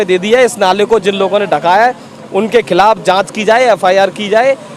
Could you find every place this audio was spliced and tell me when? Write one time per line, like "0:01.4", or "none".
none